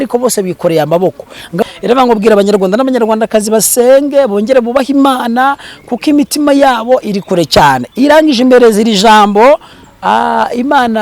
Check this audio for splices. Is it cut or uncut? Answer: cut